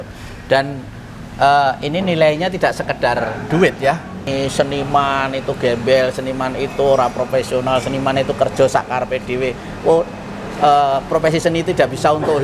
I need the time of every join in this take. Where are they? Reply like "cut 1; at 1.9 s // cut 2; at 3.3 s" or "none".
cut 1; at 4.3 s